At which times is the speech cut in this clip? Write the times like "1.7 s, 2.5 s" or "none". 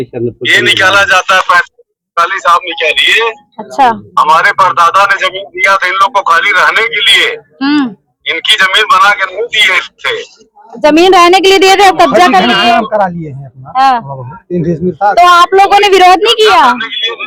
none